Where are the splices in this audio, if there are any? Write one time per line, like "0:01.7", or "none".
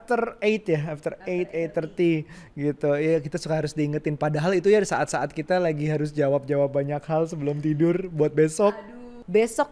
0:08.7